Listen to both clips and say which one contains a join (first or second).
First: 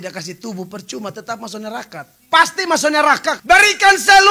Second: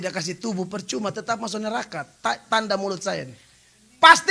first